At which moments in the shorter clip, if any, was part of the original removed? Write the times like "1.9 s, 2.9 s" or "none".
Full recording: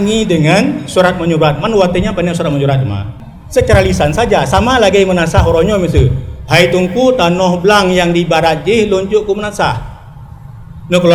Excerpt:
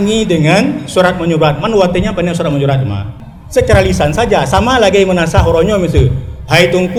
none